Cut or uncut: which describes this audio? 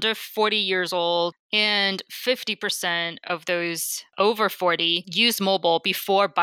cut